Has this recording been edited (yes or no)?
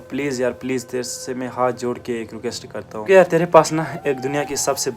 yes